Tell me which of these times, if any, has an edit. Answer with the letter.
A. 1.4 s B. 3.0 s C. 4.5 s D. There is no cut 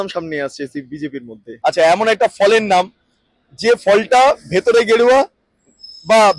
A